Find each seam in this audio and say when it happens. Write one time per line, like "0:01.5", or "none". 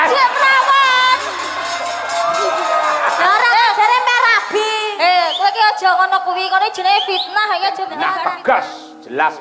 0:08.0